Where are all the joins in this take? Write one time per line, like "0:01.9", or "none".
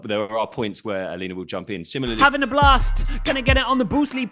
0:02.2